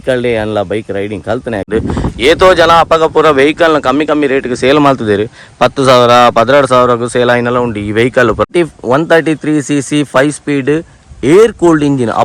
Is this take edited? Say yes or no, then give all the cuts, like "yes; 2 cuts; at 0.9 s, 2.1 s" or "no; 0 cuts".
yes; 2 cuts; at 1.7 s, 8.5 s